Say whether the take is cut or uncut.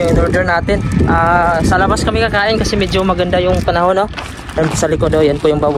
uncut